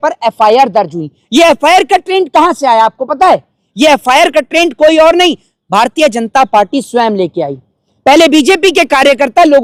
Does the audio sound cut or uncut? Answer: uncut